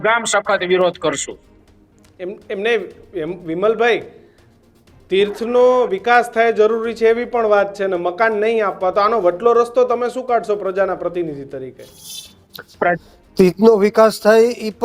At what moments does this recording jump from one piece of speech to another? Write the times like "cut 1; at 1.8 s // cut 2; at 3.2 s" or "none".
none